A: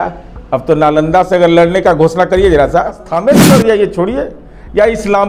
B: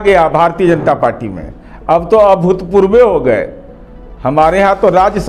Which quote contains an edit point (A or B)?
A